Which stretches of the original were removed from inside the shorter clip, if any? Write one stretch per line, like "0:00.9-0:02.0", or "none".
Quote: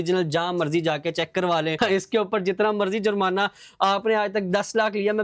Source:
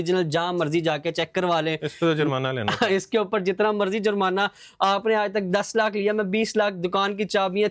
0:01.8-0:02.8